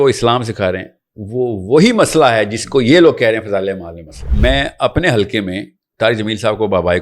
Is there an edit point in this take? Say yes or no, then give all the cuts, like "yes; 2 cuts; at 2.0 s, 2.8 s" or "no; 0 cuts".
yes; 1 cut; at 4.3 s